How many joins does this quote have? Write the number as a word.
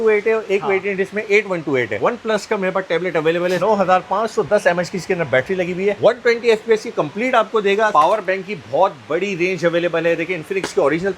three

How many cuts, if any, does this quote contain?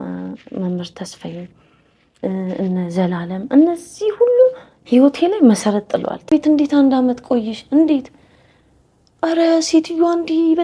one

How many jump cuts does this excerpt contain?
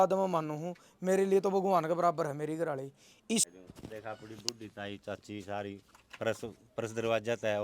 one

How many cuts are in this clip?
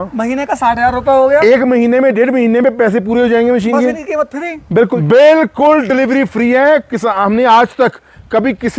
one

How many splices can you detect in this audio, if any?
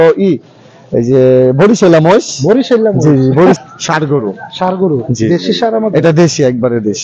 one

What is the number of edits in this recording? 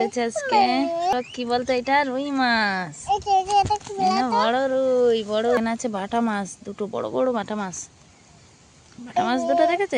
two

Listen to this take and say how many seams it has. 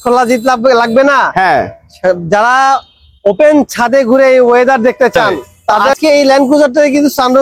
one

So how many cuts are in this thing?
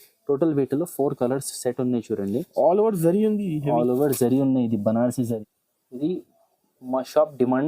one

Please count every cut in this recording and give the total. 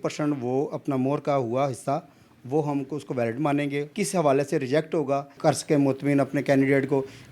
two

